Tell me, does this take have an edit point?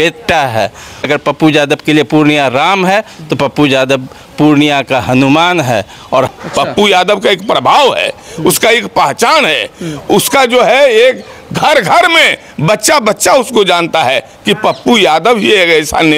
yes; 2 cuts; at 1.1 s, 6.3 s

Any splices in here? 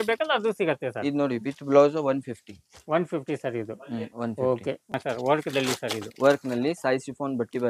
yes; 1 cut; at 4.9 s

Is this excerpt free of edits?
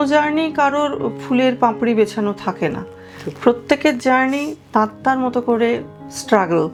yes; 0 cuts

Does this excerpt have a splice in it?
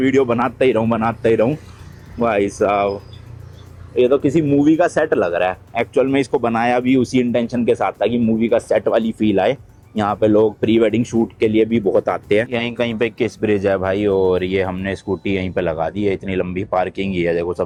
no; 0 cuts

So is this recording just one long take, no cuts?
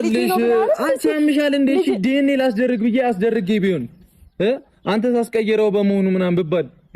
yes; 0 cuts

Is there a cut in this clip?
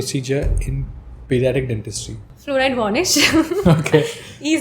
yes; 1 cut; at 2.2 s

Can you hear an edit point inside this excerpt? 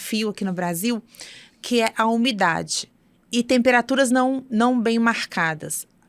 no; 0 cuts

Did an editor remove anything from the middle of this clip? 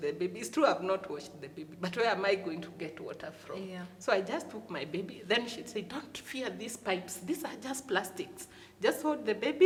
no; 0 cuts

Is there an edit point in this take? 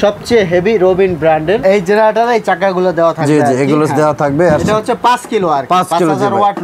yes; 1 cut; at 1.6 s

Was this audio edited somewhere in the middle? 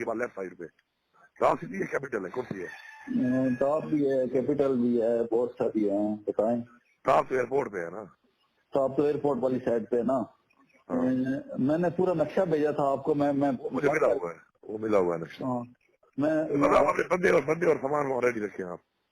yes; 1 cut; at 15.8 s

